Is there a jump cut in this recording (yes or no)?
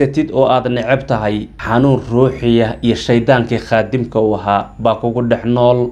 no